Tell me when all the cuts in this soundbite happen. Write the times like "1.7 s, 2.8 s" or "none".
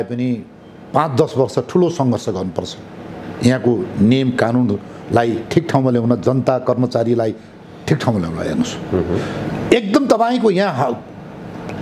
none